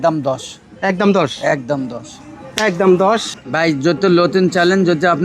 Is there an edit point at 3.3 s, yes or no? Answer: yes